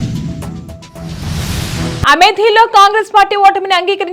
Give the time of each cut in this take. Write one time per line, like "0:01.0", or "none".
0:02.0